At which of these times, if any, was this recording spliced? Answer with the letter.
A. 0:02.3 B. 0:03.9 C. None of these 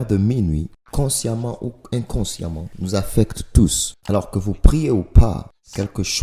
B